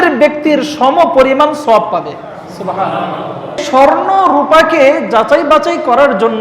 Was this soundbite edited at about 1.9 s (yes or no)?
no